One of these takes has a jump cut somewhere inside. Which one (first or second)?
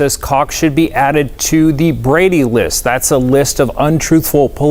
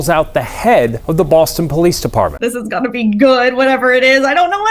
second